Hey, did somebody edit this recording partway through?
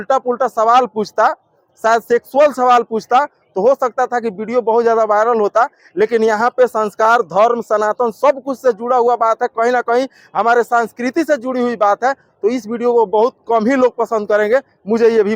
no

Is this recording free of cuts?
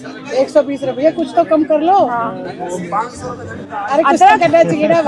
yes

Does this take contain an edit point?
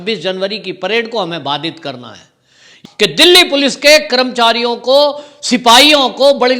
yes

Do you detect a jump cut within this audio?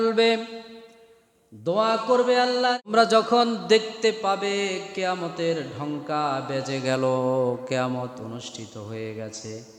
yes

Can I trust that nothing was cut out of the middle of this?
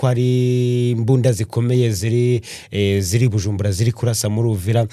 yes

